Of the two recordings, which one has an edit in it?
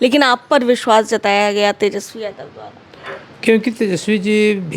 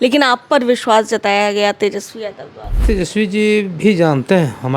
second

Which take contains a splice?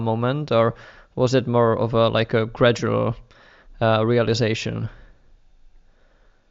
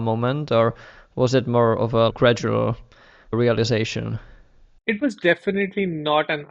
second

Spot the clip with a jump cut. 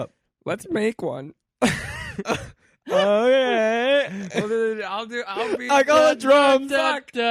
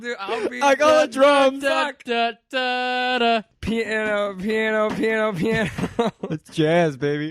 second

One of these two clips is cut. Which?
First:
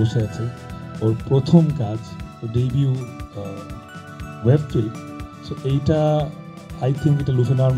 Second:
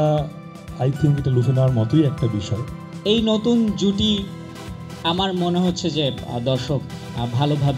second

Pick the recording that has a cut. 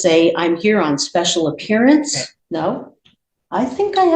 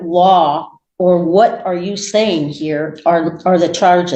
first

